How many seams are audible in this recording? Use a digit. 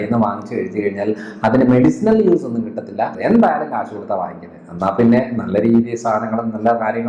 1